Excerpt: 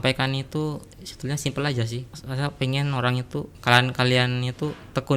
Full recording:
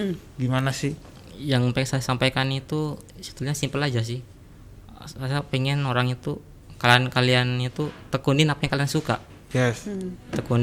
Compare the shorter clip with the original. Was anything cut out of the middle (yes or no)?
yes